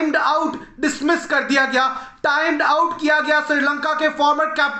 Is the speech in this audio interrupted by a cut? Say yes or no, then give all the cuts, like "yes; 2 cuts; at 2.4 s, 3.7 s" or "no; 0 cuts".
no; 0 cuts